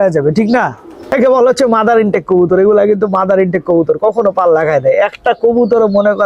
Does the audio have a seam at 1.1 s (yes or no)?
yes